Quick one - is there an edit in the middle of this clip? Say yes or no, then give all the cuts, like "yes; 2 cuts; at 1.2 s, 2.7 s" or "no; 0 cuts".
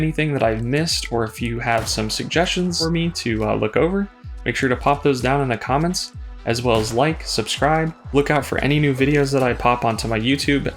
yes; 2 cuts; at 2.8 s, 8.1 s